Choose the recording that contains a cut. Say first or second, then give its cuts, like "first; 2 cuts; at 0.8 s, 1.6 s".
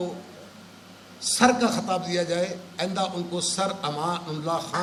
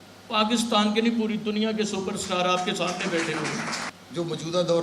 second; 1 cut; at 3.9 s